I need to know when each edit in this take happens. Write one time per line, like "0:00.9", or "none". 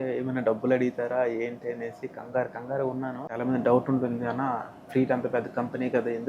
0:03.4